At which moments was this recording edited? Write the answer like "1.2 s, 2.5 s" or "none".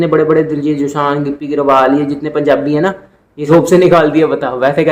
3.4 s

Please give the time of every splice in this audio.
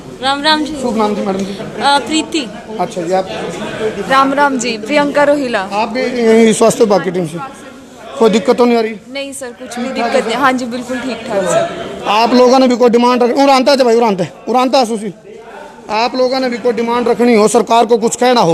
none

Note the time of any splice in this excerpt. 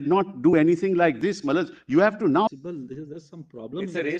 2.5 s

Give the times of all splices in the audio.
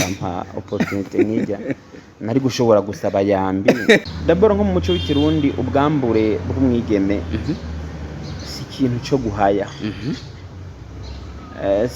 4.0 s

